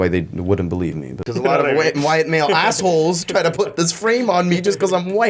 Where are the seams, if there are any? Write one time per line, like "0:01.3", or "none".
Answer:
0:01.3